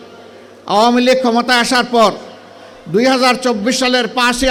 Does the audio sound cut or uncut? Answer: uncut